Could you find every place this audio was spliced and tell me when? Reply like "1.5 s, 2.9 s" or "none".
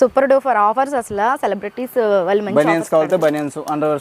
none

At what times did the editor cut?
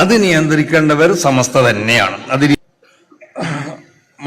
2.5 s

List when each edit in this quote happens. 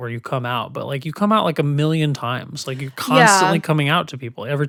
none

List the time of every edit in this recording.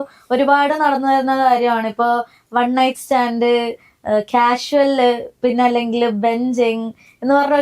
none

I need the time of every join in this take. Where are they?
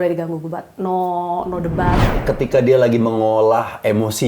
2.1 s

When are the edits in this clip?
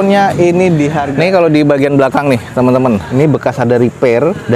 1.0 s, 3.1 s

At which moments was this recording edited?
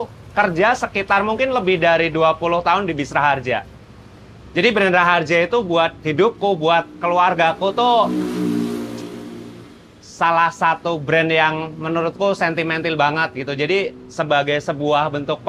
none

